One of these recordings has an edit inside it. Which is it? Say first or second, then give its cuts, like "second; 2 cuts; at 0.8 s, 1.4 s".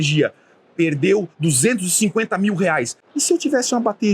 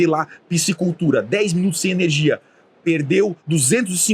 first; 1 cut; at 3.0 s